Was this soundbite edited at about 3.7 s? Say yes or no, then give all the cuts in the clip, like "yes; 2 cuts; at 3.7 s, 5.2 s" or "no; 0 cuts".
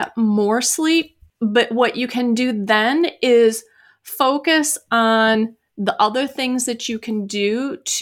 no; 1 cut; at 1.2 s